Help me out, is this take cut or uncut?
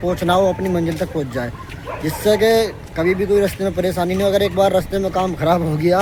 uncut